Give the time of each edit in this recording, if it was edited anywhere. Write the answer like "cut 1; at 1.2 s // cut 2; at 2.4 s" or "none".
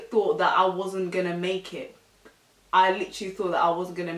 none